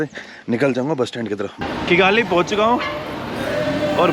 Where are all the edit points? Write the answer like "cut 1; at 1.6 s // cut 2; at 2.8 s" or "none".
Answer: cut 1; at 1.6 s